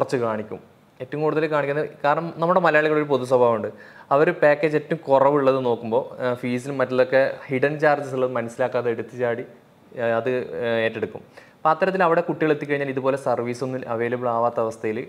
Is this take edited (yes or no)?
no